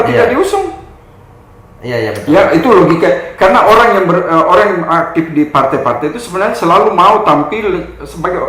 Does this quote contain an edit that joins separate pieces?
no; 0 cuts

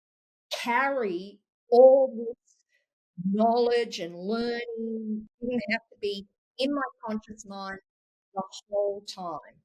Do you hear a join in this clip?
yes; 1 cut; at 5.3 s

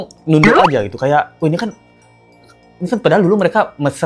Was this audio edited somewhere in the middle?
no; 0 cuts

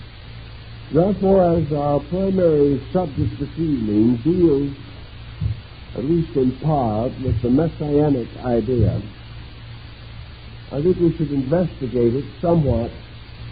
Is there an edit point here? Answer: no; 0 cuts

